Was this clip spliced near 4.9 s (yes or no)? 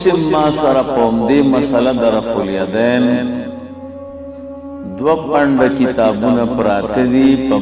yes